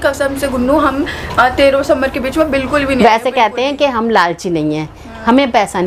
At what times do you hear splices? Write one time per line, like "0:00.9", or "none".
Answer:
none